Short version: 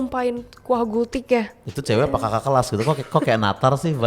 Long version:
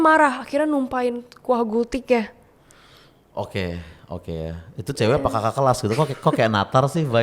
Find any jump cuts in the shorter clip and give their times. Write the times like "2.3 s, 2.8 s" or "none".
1.7 s